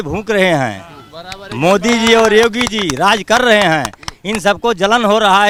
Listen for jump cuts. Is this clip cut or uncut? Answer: uncut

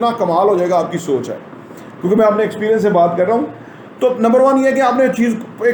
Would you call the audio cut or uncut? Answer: uncut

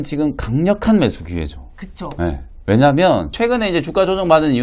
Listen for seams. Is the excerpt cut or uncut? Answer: cut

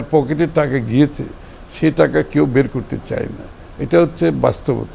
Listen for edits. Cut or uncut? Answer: uncut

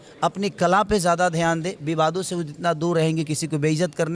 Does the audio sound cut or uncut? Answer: uncut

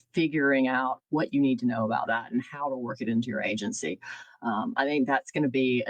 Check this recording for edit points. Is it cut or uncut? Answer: uncut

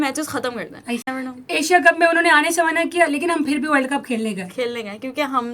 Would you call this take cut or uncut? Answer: cut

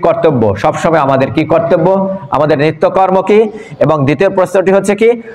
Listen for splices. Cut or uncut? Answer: uncut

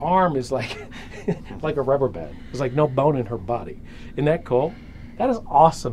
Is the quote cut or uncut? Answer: uncut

